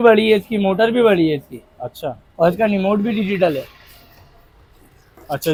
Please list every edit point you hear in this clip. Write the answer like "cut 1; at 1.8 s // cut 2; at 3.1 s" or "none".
none

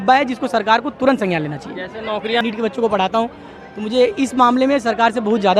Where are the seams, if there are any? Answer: cut 1; at 2.4 s

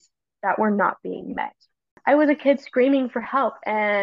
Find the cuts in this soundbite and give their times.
cut 1; at 1.9 s

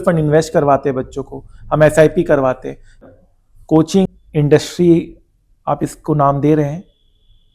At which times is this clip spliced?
cut 1; at 3.1 s // cut 2; at 4.1 s

